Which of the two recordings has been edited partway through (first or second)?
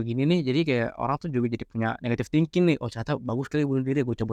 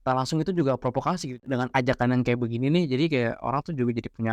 second